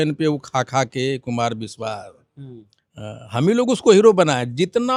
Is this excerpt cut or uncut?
uncut